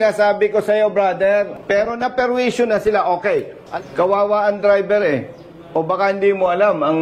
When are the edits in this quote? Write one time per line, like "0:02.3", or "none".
0:01.6
0:03.6